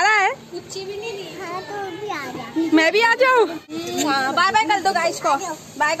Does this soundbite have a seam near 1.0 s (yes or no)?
no